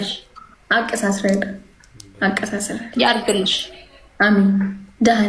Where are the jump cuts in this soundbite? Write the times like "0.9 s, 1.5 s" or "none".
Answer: none